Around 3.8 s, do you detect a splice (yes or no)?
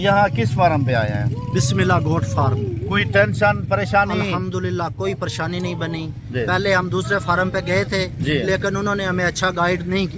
no